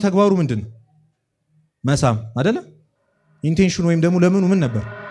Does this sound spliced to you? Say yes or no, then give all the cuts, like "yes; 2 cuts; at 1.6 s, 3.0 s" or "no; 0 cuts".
no; 0 cuts